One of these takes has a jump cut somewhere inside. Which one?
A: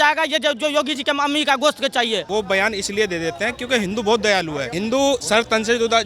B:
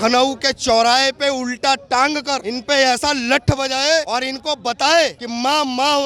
A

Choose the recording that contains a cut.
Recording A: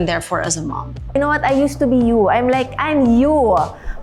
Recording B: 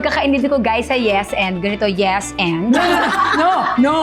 A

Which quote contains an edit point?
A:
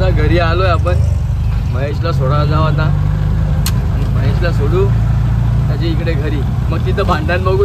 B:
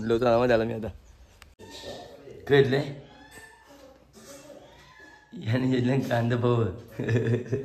B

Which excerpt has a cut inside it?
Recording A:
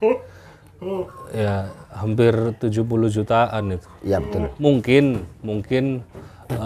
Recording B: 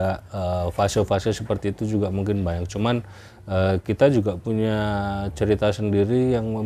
A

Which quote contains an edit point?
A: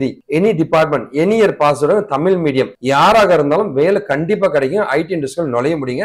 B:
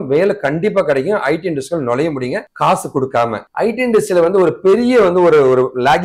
B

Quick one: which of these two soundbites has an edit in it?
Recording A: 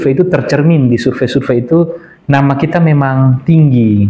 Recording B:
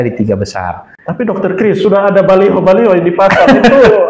B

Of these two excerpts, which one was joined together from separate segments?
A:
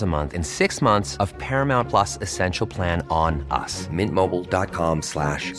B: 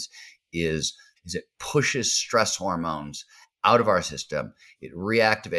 B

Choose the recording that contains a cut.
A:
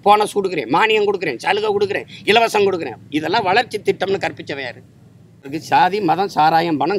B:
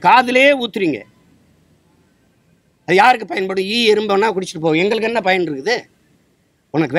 A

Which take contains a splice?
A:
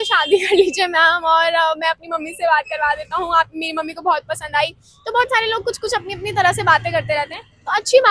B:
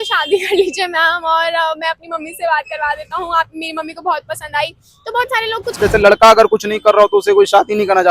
B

